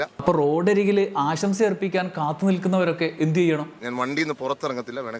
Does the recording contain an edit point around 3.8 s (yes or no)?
yes